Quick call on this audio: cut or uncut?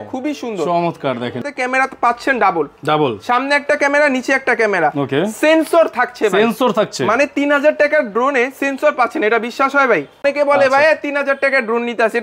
cut